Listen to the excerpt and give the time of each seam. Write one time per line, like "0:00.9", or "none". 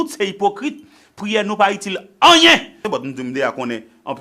0:02.8